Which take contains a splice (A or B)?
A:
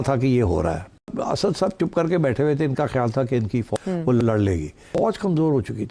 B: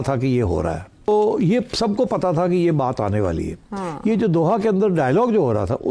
A